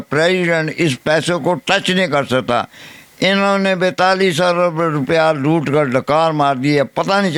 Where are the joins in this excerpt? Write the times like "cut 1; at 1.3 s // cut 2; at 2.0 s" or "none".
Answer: none